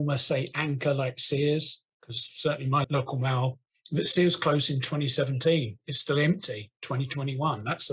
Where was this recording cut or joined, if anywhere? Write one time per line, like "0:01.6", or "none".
none